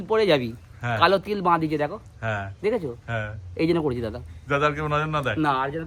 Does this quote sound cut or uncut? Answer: uncut